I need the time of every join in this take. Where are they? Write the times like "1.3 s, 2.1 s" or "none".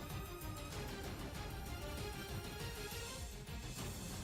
none